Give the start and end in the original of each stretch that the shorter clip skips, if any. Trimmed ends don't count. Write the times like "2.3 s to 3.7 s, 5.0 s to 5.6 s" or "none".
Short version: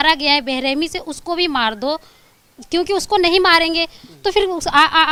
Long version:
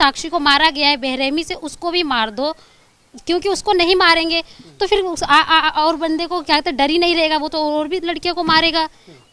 none